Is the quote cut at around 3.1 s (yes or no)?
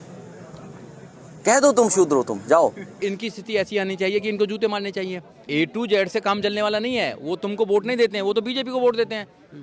yes